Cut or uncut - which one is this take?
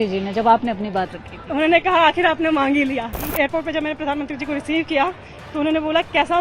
cut